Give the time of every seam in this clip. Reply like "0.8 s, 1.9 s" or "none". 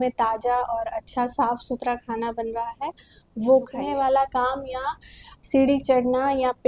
3.8 s